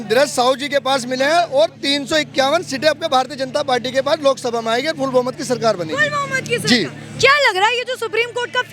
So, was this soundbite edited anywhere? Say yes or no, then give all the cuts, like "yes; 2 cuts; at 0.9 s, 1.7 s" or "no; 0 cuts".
no; 0 cuts